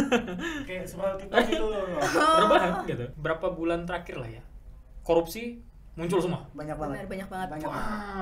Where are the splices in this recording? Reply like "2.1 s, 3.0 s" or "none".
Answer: 3.1 s